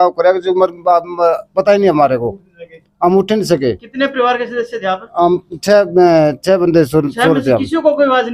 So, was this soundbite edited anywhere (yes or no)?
no